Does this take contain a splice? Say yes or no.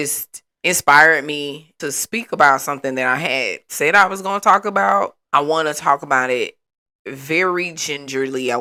no